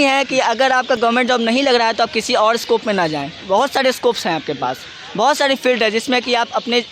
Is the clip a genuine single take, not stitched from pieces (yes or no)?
yes